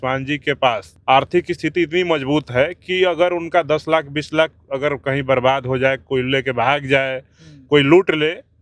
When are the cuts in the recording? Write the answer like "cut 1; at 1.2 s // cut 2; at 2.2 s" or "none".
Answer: cut 1; at 0.9 s